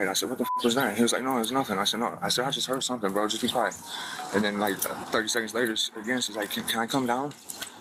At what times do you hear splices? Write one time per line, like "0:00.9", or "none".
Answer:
none